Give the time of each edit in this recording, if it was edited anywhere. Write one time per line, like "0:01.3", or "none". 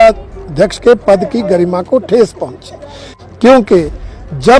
0:03.1